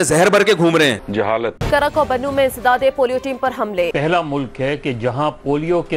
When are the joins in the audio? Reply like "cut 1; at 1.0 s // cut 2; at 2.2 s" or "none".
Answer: cut 1; at 1.2 s // cut 2; at 3.9 s